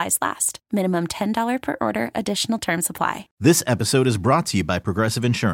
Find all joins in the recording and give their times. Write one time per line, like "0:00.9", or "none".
0:03.3